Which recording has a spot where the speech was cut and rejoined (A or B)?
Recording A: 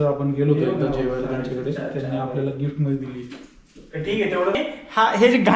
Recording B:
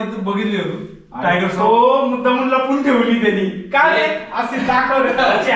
A